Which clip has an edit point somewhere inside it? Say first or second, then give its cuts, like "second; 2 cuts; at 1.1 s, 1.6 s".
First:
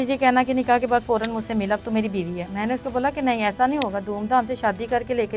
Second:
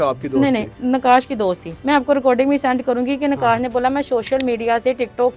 second; 1 cut; at 1.7 s